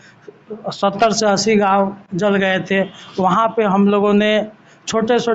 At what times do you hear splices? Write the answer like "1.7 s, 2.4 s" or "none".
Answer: none